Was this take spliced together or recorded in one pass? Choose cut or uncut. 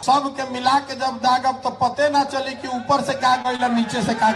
uncut